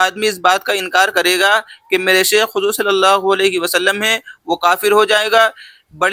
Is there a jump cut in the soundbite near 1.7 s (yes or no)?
no